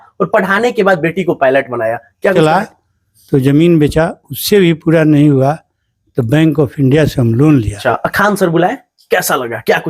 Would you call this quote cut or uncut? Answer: cut